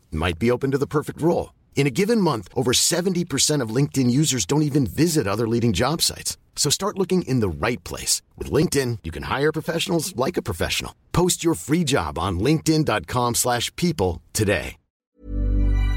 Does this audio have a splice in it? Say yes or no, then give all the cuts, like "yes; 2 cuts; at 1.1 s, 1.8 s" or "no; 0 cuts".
yes; 1 cut; at 14.8 s